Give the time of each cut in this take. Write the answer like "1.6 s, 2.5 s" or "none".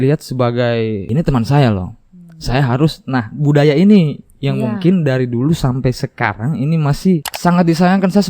1.0 s, 7.3 s